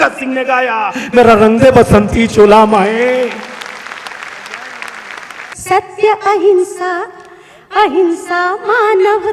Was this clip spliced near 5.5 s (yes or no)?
yes